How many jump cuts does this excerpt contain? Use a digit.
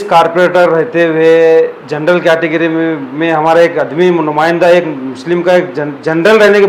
0